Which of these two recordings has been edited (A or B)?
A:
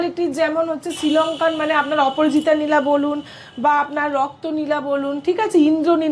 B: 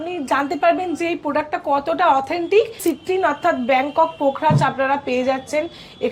B